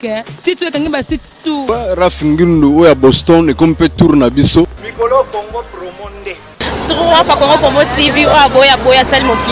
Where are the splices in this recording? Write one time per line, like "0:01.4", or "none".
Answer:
0:01.6
0:04.8